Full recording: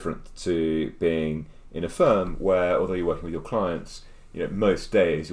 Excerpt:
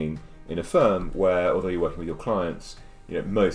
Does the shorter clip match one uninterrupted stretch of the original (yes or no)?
yes